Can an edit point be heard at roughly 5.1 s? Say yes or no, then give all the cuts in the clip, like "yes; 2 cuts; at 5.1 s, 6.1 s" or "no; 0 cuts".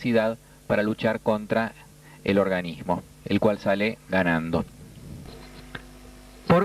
no; 1 cut; at 3.5 s